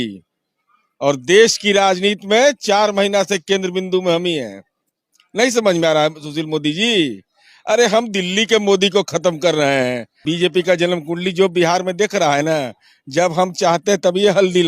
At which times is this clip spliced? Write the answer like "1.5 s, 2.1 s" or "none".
10.1 s